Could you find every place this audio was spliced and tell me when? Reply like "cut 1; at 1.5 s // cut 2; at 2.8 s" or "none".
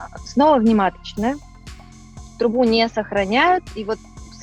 none